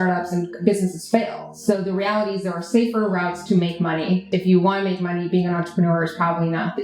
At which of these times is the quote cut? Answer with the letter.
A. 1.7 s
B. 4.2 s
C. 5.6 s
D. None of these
B